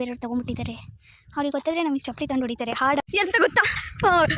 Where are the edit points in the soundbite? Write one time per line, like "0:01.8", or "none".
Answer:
0:03.0

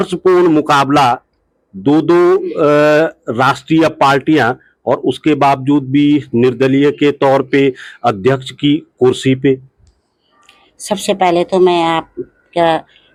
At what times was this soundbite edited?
none

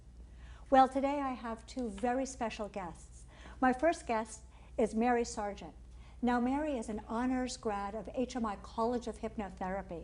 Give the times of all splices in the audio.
0:07.9

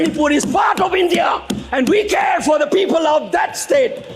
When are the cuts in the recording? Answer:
none

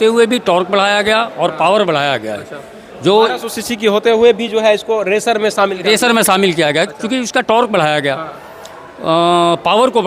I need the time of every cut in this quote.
none

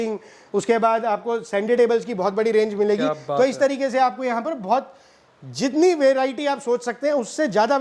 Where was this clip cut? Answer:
none

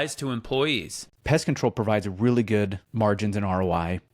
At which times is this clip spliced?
0:01.1
0:02.8

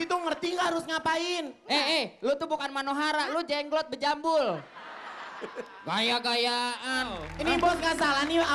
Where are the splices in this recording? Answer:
0:07.2

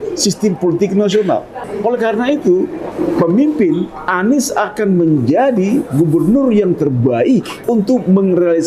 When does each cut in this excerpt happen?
0:01.6
0:02.8
0:07.5

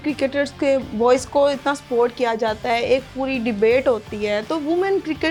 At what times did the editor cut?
none

